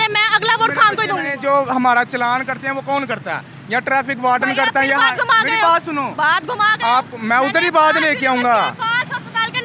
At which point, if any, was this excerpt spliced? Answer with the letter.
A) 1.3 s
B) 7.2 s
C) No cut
A